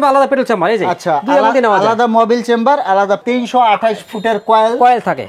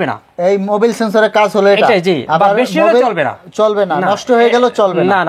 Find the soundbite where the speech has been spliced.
first; 1 cut; at 3.2 s

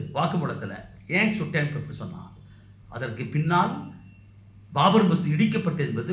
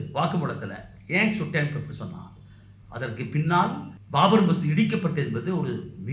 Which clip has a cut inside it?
second; 1 cut; at 3.9 s

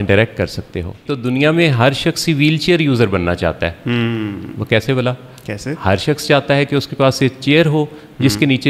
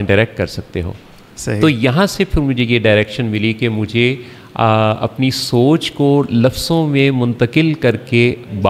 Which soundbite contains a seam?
first; 1 cut; at 1.1 s

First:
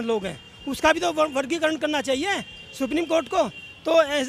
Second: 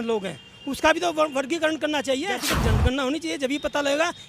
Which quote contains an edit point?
second; 1 cut; at 2.4 s

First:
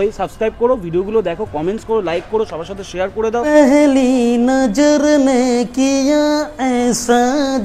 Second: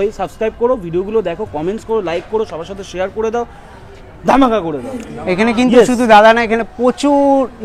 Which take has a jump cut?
first; 1 cut; at 3.5 s

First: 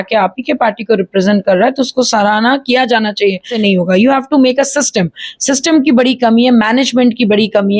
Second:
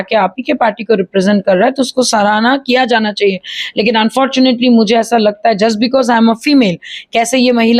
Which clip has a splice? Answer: first; 1 cut; at 3.5 s

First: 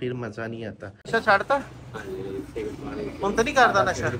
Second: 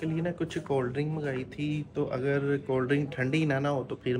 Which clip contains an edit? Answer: first; 1 cut; at 1.1 s

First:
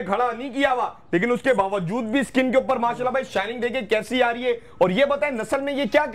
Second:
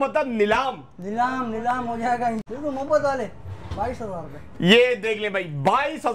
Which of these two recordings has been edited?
second; 1 cut; at 2.4 s

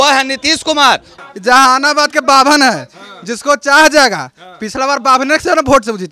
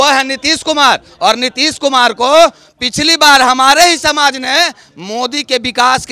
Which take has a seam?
first; 1 cut; at 1.1 s

